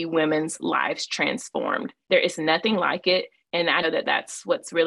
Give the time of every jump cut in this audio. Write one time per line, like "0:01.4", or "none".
0:03.4